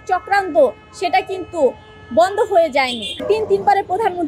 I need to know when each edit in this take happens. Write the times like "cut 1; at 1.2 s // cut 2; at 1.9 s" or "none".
cut 1; at 3.1 s